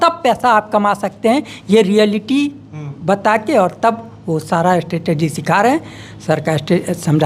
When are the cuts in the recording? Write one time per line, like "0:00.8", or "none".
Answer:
none

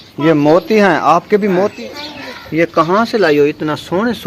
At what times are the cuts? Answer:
0:01.7

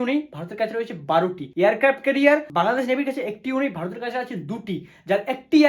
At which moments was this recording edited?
0:01.4
0:02.5

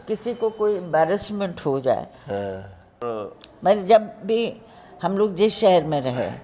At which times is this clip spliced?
0:03.1

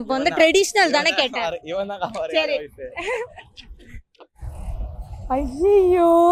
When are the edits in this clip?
none

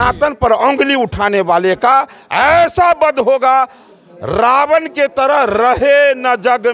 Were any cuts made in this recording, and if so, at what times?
none

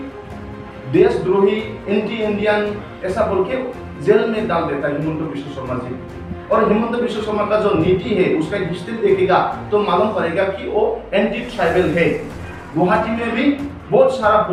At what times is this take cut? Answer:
none

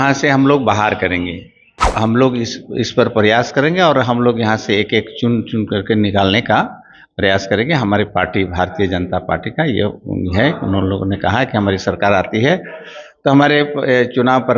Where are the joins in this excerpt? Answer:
0:01.6

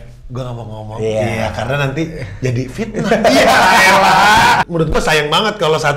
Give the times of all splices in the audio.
0:04.7

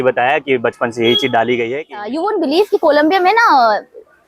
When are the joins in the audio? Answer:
0:02.2

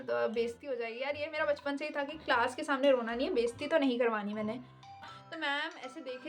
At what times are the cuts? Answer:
0:05.0

